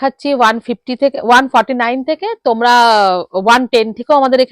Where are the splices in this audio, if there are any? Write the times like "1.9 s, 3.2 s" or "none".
none